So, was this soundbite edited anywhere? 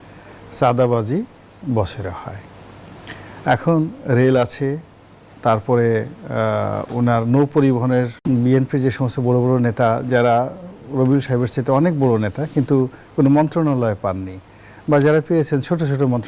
yes; 1 cut; at 8.2 s

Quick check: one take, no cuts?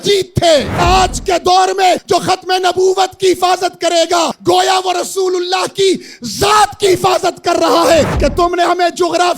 no; 4 cuts; at 0.8 s, 2.0 s, 4.3 s, 8.1 s

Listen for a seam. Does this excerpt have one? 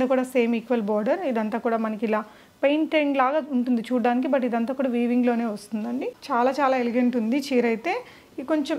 yes; 1 cut; at 6.1 s

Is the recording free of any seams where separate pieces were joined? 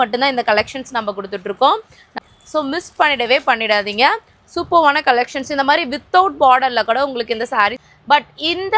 no; 2 cuts; at 2.2 s, 7.9 s

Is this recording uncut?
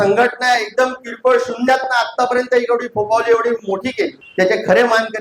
no; 1 cut; at 4.2 s

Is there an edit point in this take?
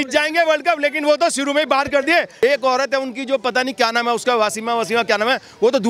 yes; 1 cut; at 2.3 s

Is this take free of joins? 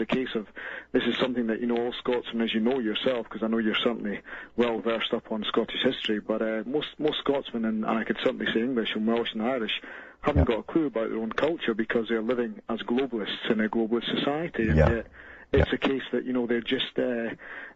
no; 1 cut; at 15.6 s

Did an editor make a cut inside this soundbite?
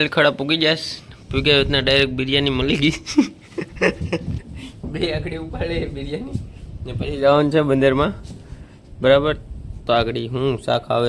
no; 0 cuts

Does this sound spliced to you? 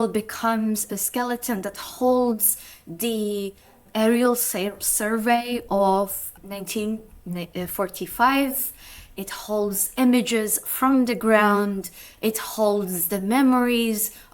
yes; 3 cuts; at 0.9 s, 3.8 s, 6.3 s

